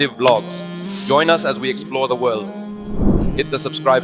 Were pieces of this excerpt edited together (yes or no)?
no